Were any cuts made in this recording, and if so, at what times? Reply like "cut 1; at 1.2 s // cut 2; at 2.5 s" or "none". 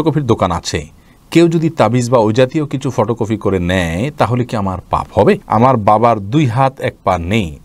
cut 1; at 5.4 s